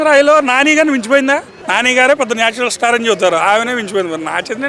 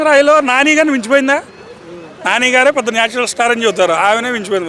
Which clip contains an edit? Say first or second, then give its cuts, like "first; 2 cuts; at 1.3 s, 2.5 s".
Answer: first; 1 cut; at 1.6 s